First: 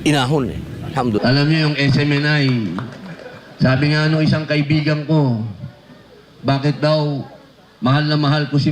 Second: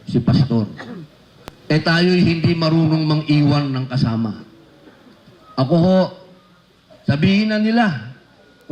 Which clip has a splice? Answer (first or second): first